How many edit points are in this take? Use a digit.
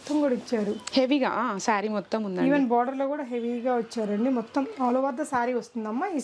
0